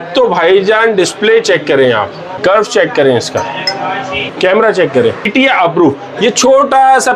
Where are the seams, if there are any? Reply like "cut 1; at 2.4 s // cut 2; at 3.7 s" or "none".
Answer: cut 1; at 2.4 s // cut 2; at 4.2 s // cut 3; at 5.3 s